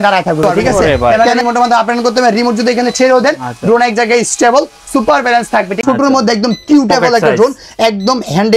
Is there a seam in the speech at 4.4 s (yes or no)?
no